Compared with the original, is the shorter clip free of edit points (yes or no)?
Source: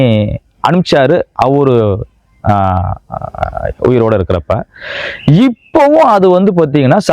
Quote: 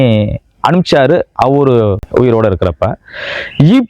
no